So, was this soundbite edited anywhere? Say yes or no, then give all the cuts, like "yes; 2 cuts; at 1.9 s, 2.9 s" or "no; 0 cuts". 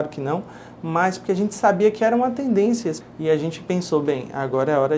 yes; 1 cut; at 3.1 s